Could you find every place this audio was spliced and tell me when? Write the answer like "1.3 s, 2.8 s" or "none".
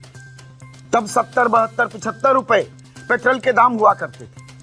0.9 s